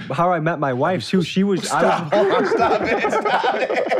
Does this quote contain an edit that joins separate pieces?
no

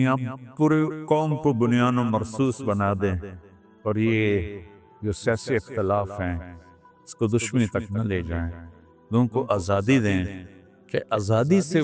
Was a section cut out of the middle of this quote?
no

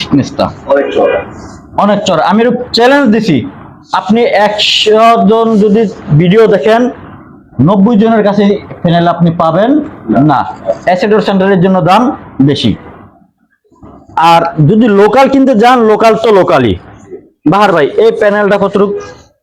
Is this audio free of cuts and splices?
yes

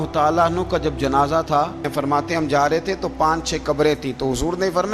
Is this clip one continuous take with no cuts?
no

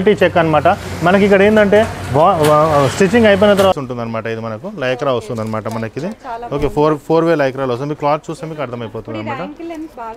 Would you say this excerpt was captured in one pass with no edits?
no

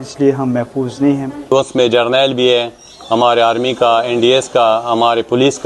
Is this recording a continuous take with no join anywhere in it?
no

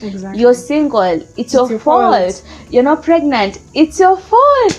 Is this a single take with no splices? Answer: yes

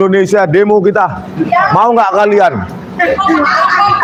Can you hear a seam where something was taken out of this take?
no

